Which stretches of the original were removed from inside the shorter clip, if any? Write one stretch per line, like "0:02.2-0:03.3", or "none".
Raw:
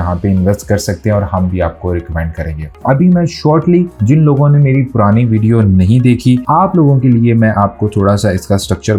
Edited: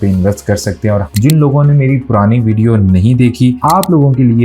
0:01.3-0:03.9